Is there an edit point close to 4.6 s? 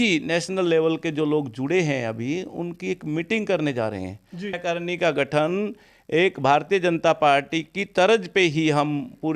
yes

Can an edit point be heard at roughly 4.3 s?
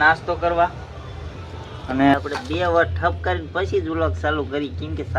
no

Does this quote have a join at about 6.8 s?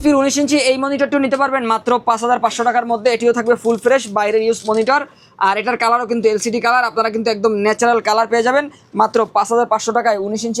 no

